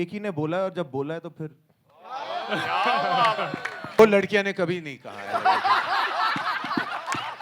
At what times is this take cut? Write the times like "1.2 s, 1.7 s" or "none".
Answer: 4.0 s